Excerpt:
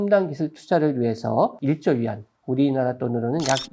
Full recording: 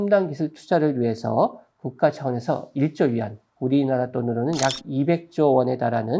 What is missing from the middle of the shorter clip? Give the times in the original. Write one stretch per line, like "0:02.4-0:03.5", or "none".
0:01.6-0:02.7